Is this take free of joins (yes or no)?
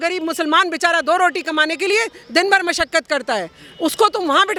yes